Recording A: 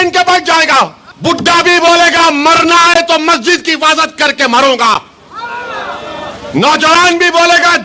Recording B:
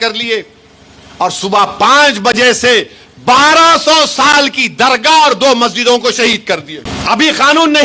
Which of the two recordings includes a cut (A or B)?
A